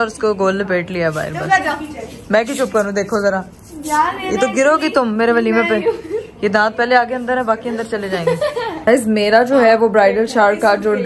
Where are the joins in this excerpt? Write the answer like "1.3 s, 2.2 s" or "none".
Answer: none